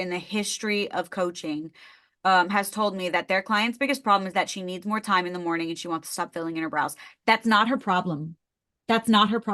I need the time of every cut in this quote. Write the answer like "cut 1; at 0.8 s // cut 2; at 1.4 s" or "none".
none